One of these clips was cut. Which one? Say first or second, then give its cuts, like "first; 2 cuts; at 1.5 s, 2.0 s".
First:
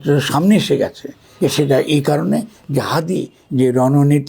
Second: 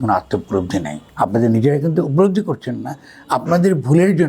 second; 1 cut; at 1.0 s